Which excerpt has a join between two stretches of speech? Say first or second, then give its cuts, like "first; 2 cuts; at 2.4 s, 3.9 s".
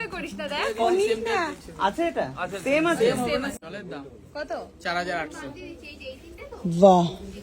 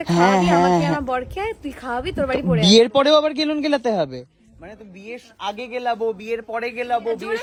first; 1 cut; at 3.5 s